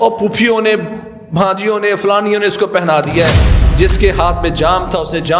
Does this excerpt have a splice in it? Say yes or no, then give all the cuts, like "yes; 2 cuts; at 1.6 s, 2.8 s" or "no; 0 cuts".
yes; 1 cut; at 3.6 s